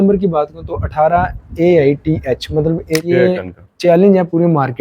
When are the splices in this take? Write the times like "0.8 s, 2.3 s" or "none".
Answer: 3.0 s